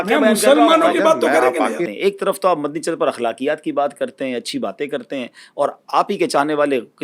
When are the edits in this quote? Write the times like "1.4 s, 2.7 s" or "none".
1.9 s